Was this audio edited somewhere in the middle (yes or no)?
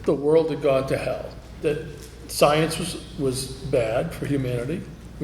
yes